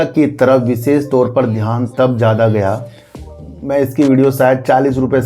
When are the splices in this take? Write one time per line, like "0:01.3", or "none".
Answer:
0:03.4